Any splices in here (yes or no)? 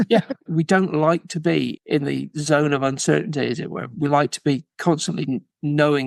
no